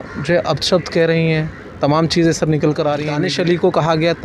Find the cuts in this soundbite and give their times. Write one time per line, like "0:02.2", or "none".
0:03.1